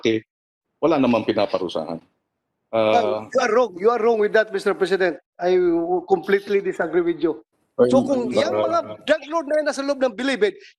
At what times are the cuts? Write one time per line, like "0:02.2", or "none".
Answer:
0:07.6